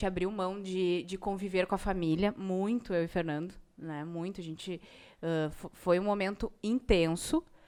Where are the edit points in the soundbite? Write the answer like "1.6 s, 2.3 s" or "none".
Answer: none